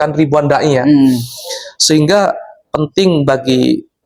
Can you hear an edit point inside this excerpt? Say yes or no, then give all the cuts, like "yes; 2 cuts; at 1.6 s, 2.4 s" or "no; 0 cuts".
no; 0 cuts